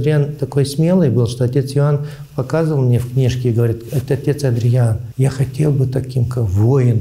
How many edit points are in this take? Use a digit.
1